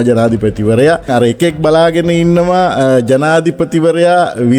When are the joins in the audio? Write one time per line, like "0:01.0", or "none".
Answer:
0:01.1